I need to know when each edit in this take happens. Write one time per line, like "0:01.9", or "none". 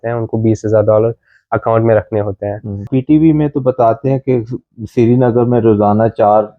0:02.9